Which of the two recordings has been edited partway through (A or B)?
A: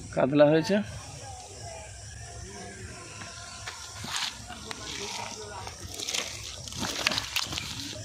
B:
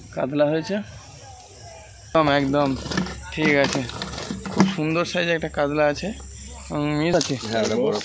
B